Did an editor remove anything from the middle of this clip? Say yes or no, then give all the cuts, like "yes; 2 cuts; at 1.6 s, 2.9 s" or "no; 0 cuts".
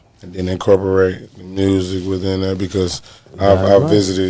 no; 0 cuts